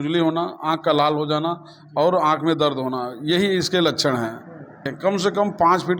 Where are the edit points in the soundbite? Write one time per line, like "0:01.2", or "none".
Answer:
0:04.8